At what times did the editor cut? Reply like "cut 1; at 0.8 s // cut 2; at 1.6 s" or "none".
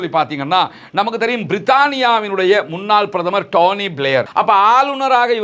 cut 1; at 4.3 s